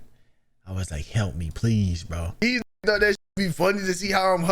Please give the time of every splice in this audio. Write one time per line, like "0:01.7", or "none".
0:02.4